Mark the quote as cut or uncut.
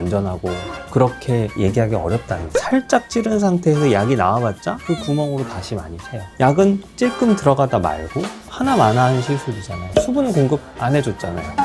cut